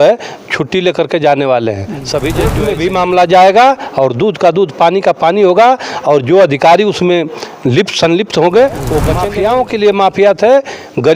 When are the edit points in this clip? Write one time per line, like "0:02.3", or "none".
0:02.6
0:09.2